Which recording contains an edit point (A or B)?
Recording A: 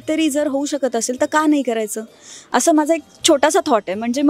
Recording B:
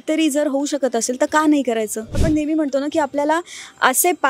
B